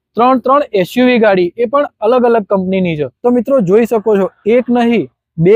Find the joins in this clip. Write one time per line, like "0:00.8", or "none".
0:03.1